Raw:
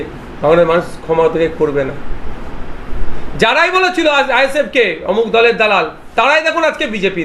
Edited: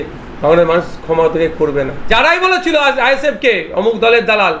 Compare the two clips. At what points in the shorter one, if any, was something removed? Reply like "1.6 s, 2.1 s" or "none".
2.0 s